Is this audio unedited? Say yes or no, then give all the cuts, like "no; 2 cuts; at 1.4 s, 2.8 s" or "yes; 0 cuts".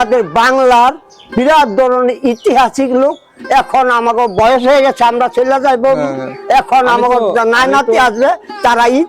yes; 0 cuts